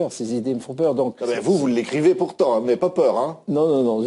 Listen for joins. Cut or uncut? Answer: cut